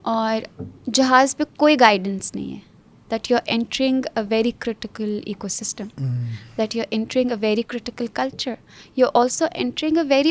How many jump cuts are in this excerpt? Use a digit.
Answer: 0